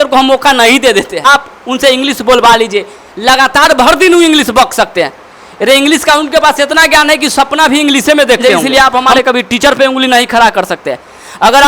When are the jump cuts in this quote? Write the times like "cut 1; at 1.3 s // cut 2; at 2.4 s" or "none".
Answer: cut 1; at 1.2 s // cut 2; at 8.4 s

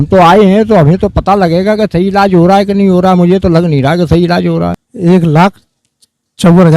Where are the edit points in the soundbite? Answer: cut 1; at 4.9 s

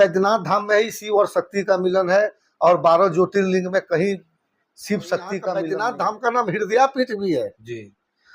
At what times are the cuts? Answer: cut 1; at 5.6 s

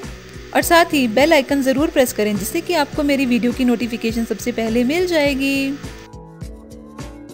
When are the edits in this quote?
cut 1; at 5.8 s

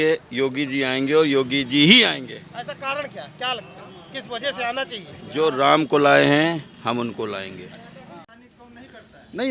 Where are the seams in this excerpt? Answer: cut 1; at 8.1 s

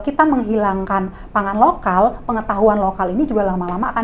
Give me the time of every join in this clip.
none

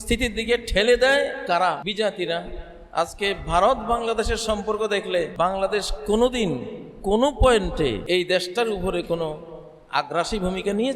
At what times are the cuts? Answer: cut 1; at 1.8 s // cut 2; at 5.3 s // cut 3; at 8.0 s

